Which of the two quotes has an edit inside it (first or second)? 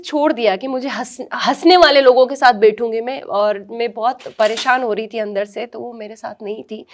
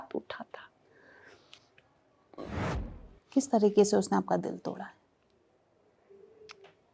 second